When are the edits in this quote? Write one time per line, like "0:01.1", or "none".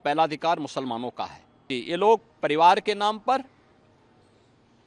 0:01.8

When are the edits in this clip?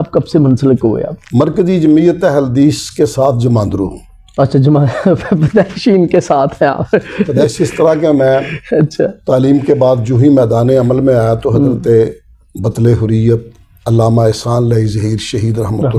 none

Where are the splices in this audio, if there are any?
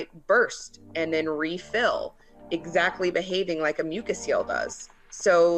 none

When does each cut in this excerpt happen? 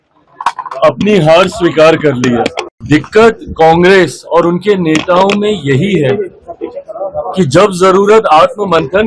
0:02.7

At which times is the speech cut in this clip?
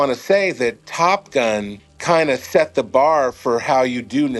none

